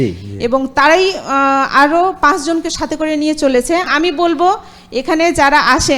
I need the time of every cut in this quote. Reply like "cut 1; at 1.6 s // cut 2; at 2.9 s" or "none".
cut 1; at 3.9 s